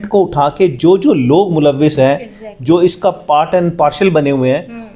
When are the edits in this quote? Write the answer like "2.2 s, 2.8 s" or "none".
none